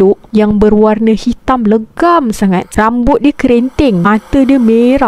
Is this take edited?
yes; 1 cut; at 2.7 s

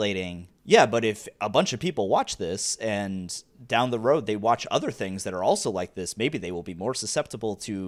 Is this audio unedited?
yes; 0 cuts

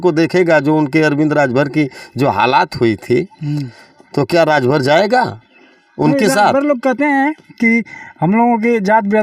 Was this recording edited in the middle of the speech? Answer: no; 0 cuts

